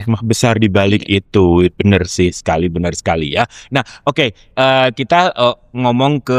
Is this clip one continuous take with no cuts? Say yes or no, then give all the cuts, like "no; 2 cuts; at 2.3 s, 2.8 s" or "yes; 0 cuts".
yes; 0 cuts